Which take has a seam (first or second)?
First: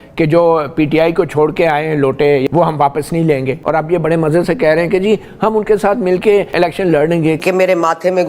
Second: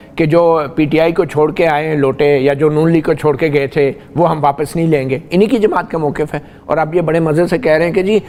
first